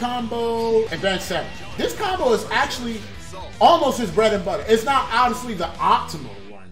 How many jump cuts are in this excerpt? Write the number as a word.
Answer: one